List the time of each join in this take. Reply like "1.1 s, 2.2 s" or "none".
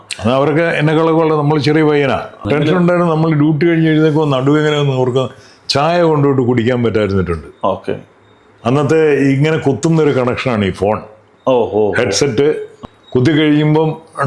2.4 s, 12.7 s